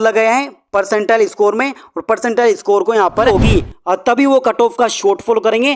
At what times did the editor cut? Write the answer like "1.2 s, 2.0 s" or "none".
3.3 s